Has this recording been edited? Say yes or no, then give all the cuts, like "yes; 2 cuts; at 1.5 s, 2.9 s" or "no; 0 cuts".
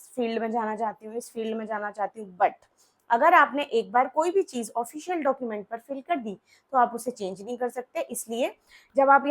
no; 0 cuts